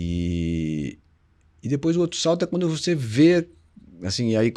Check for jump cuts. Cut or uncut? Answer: uncut